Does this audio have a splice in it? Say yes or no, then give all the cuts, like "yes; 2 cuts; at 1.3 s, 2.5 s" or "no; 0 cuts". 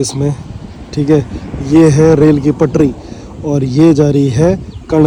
no; 0 cuts